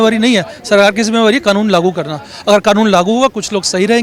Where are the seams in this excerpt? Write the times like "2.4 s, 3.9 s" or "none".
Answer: none